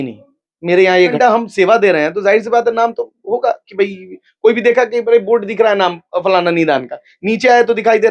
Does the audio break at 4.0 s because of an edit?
no; 1 cut; at 1.1 s

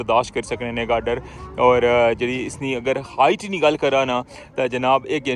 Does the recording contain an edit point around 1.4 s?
no; 0 cuts

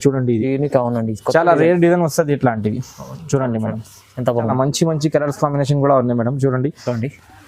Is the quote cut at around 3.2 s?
no; 1 cut; at 4.5 s

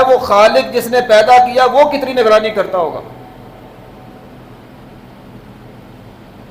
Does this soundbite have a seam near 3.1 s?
no; 0 cuts

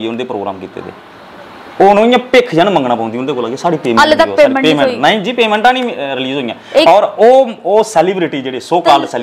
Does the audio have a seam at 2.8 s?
no; 0 cuts

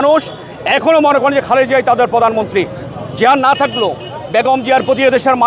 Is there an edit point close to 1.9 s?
no; 0 cuts

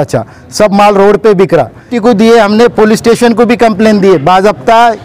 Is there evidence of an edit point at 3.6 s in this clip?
no; 1 cut; at 1.9 s

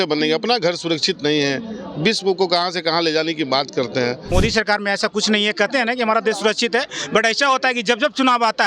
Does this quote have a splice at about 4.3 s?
yes; 1 cut; at 4.3 s

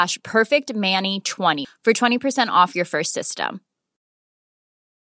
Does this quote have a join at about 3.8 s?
no; 1 cut; at 1.6 s

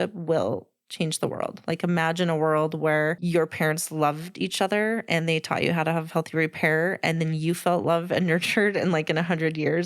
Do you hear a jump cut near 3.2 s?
yes; 1 cut; at 3.2 s

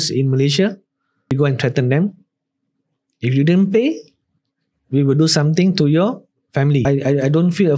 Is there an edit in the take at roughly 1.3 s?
yes; 2 cuts; at 1.3 s, 6.8 s

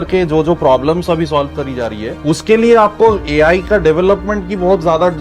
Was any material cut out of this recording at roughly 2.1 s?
yes; 1 cut; at 2.1 s

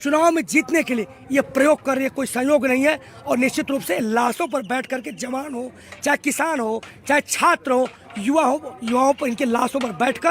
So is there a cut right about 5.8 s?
no; 0 cuts

